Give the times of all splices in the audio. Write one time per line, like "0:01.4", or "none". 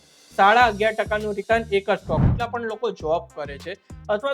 0:02.3

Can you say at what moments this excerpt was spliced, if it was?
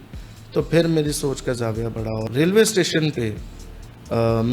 0:02.3

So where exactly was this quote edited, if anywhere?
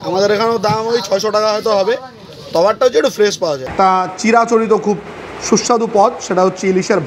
0:03.7

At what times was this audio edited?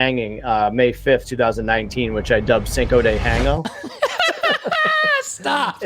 0:03.7

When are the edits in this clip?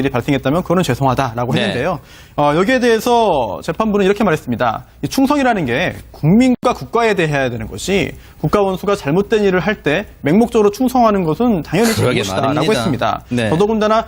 0:02.2

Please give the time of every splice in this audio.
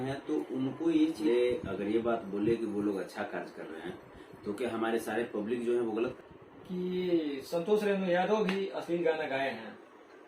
0:01.3
0:06.2

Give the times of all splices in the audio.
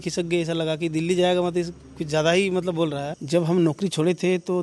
0:03.1

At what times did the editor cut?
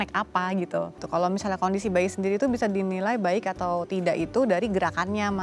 0:01.0

